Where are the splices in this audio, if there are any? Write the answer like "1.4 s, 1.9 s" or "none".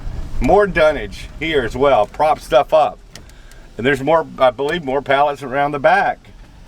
none